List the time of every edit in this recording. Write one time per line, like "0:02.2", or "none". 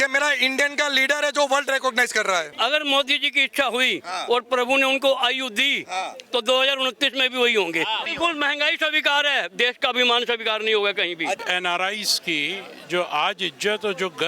0:02.5
0:08.1
0:11.4